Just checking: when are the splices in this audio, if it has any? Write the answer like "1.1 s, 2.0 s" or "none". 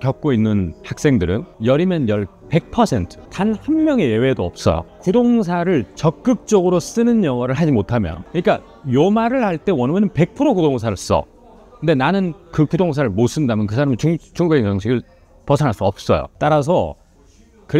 3.2 s, 8.2 s